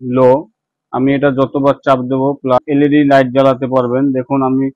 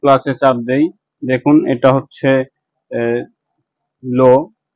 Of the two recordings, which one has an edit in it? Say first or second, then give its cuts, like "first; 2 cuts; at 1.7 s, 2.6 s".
first; 1 cut; at 2.6 s